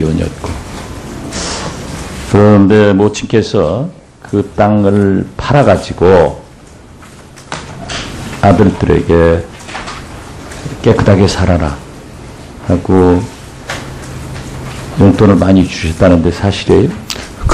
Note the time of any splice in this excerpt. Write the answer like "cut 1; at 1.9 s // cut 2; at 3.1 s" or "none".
none